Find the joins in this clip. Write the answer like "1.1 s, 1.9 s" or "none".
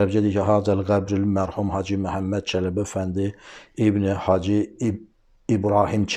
none